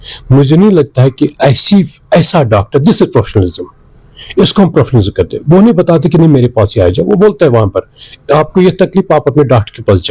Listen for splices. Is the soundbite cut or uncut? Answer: uncut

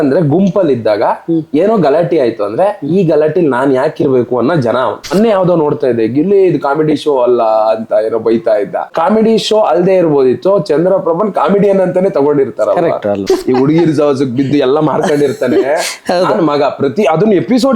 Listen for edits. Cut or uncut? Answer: cut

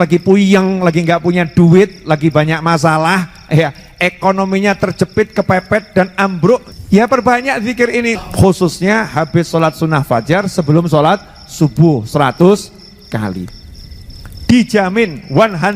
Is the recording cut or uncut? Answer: cut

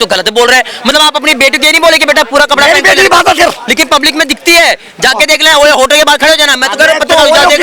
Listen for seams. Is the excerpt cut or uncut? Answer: cut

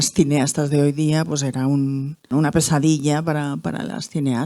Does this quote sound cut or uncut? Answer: cut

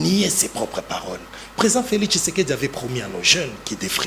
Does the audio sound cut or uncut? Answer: uncut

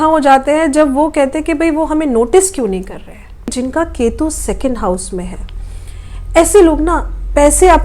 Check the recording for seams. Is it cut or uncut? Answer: cut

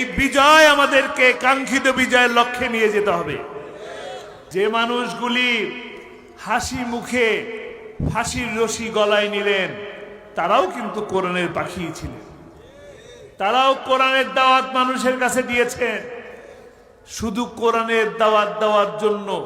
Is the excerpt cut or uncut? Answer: cut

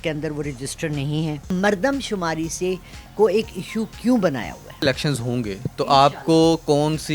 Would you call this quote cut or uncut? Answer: cut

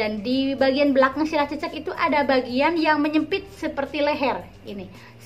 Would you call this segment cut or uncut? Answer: uncut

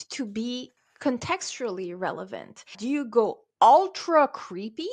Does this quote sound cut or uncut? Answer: cut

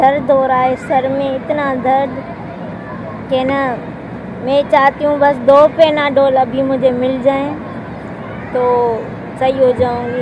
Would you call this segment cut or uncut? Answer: uncut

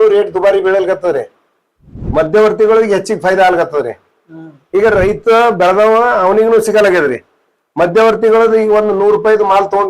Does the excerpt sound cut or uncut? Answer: uncut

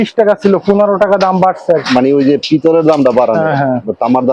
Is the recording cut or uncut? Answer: uncut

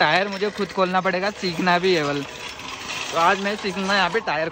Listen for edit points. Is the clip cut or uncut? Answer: uncut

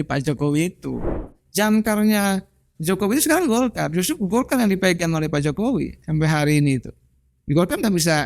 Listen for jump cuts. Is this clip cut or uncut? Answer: cut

